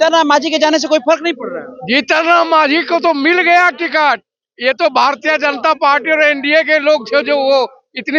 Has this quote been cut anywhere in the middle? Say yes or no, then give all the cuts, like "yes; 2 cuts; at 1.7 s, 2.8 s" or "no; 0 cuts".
no; 0 cuts